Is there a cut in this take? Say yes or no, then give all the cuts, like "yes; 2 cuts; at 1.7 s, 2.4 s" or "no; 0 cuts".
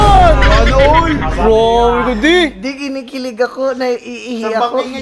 no; 0 cuts